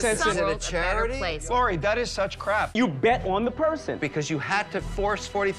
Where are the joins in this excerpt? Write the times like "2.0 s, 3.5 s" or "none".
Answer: 2.7 s